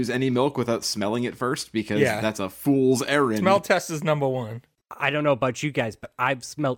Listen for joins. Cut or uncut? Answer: cut